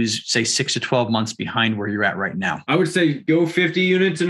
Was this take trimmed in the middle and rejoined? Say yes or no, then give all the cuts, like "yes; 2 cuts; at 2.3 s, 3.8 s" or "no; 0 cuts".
yes; 2 cuts; at 2.6 s, 3.2 s